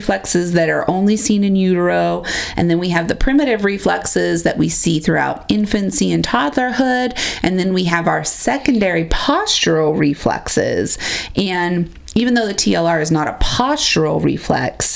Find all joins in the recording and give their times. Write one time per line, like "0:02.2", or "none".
none